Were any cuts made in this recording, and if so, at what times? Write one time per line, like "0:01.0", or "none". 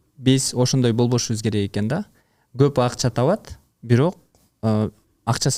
none